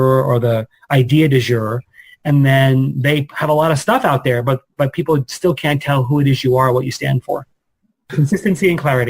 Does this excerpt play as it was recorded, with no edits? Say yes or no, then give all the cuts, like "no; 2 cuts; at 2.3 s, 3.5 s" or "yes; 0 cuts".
no; 1 cut; at 8.1 s